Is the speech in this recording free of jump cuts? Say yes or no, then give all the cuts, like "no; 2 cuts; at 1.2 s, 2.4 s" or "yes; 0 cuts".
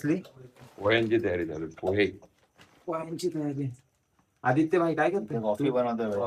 yes; 0 cuts